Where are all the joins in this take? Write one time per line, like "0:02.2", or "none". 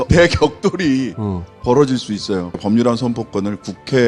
0:02.6